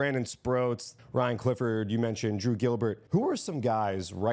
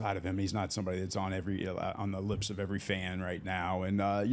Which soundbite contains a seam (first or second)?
first